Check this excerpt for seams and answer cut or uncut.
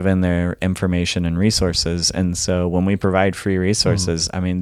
uncut